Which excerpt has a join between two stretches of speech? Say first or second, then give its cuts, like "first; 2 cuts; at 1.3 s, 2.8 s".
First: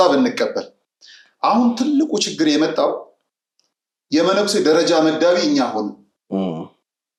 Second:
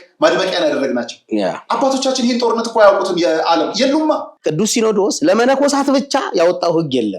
second; 1 cut; at 4.3 s